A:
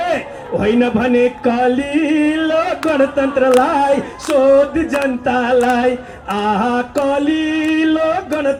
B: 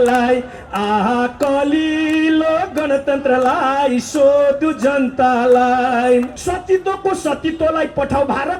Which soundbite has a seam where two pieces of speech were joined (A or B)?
B